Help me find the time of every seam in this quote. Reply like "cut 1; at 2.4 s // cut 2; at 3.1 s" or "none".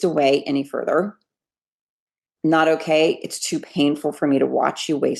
none